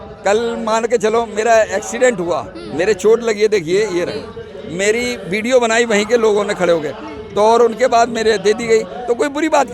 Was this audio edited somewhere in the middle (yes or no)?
no